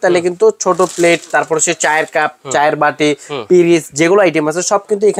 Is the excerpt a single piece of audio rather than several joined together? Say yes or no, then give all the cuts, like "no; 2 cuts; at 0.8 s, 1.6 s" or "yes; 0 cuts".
yes; 0 cuts